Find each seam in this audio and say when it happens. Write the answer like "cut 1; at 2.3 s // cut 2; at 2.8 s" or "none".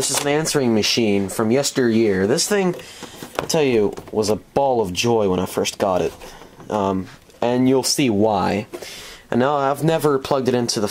cut 1; at 9.8 s